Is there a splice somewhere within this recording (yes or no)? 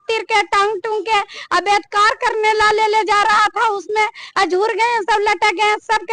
no